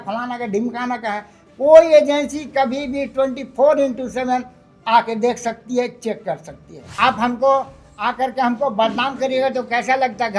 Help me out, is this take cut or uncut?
cut